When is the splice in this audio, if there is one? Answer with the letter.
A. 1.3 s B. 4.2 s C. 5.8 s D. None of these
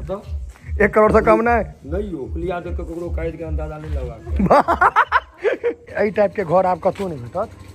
C